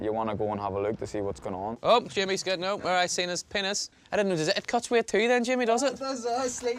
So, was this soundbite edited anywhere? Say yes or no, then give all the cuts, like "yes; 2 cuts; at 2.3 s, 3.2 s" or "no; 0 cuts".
yes; 2 cuts; at 1.8 s, 3.9 s